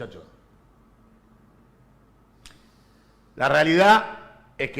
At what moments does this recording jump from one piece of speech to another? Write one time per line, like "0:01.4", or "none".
0:01.4